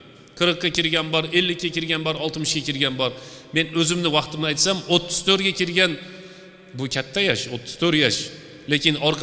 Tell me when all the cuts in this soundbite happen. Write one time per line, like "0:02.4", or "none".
none